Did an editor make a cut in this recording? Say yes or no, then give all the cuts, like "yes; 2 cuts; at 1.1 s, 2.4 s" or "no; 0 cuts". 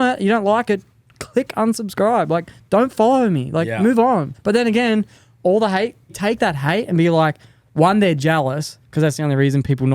yes; 3 cuts; at 4.3 s, 6.2 s, 8.7 s